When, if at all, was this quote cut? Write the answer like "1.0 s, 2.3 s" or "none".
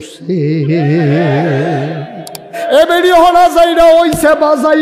2.6 s

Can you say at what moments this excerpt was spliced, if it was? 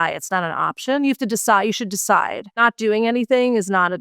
2.4 s

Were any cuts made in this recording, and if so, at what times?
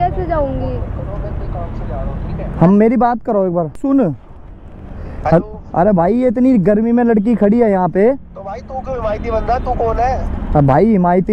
3.8 s

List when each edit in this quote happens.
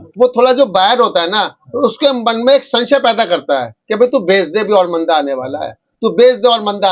none

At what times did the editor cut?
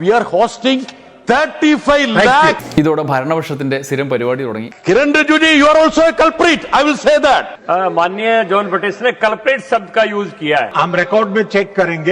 2.6 s, 4.7 s, 7.6 s, 10.7 s

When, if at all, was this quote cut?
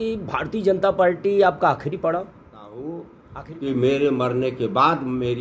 2.3 s

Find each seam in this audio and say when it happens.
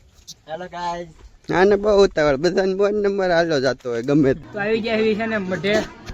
4.4 s

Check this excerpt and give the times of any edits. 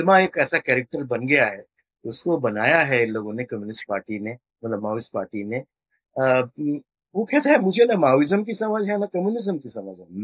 none

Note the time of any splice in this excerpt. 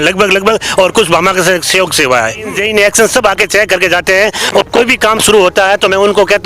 2.6 s

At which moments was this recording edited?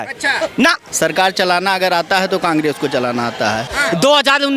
0.9 s, 3.7 s

